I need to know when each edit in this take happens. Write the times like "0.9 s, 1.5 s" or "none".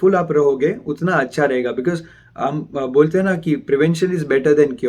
none